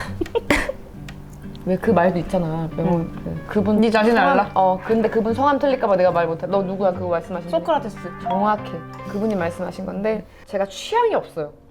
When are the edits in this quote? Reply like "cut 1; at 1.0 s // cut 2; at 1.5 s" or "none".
none